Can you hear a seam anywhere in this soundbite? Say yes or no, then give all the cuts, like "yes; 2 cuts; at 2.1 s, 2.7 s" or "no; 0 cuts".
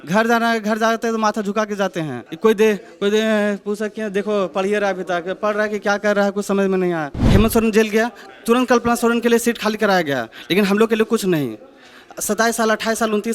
yes; 2 cuts; at 2.2 s, 7.2 s